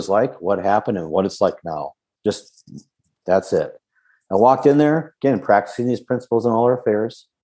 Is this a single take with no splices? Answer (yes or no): yes